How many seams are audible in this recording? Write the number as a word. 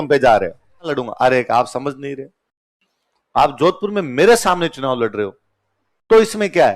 one